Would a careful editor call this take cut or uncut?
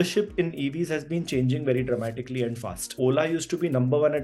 cut